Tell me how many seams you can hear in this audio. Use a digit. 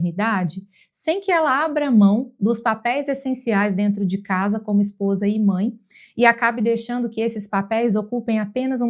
0